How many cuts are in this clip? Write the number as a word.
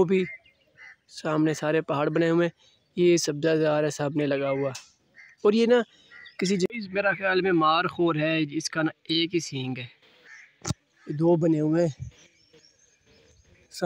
one